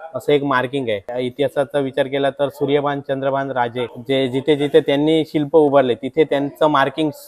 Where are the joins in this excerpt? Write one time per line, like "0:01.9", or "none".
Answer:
0:01.2